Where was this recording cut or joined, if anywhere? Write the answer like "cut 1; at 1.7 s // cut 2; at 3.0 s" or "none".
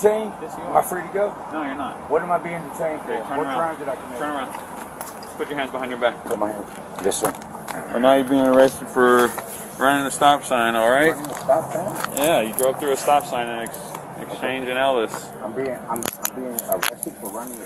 none

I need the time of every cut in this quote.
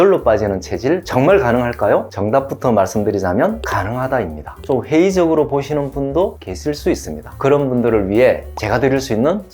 cut 1; at 4.6 s // cut 2; at 7.2 s

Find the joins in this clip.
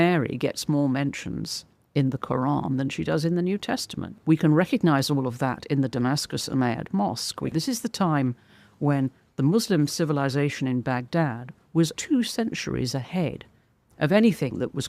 cut 1; at 4.2 s // cut 2; at 7.5 s // cut 3; at 11.9 s

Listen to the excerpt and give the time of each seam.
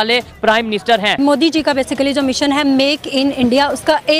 cut 1; at 1.1 s

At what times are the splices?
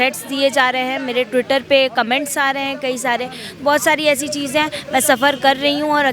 none

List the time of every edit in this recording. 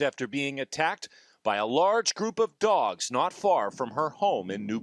cut 1; at 2.3 s

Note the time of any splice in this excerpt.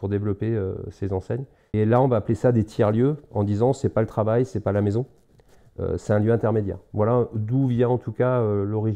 cut 1; at 1.6 s

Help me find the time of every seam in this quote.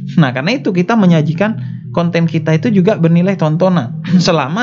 none

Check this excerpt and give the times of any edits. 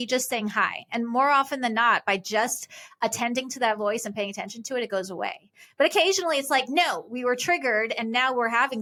none

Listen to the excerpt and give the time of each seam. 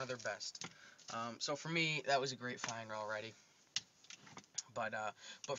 cut 1; at 2.9 s

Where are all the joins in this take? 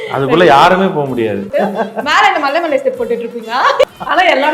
cut 1; at 1.5 s // cut 2; at 3.8 s

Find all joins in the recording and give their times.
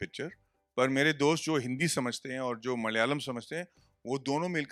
none

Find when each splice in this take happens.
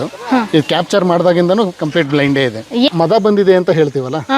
cut 1; at 2.9 s

